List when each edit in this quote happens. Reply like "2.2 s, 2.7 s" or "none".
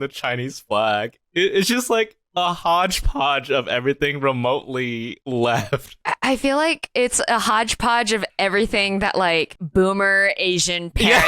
5.1 s, 6.0 s, 9.6 s